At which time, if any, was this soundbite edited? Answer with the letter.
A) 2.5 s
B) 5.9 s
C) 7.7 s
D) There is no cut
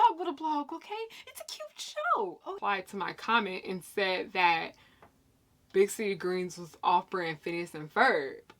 A